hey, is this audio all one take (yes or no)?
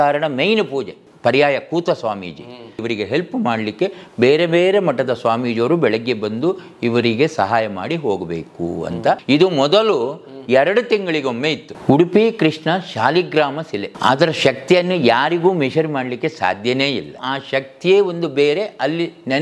no